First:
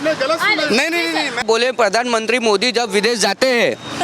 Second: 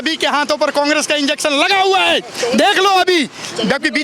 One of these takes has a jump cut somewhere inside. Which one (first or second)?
first